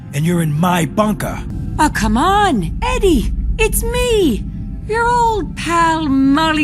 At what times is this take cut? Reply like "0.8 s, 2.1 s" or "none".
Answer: 1.6 s